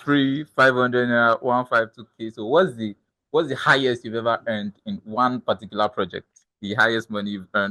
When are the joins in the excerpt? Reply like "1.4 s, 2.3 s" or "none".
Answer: none